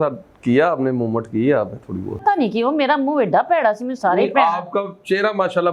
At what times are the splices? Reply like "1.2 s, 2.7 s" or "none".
2.2 s